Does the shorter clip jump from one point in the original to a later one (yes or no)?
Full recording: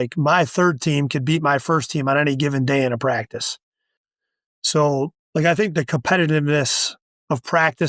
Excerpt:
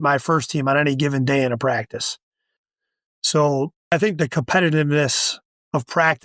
yes